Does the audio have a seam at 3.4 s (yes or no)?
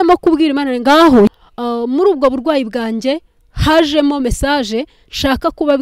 no